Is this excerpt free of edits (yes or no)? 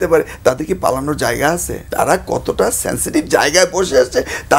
no